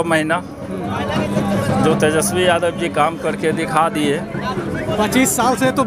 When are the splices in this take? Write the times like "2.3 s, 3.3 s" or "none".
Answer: none